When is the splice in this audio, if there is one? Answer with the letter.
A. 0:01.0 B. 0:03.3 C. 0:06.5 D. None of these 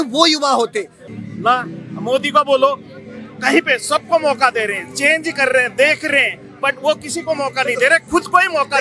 A